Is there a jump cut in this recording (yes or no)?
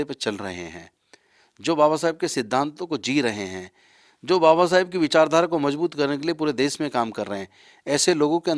no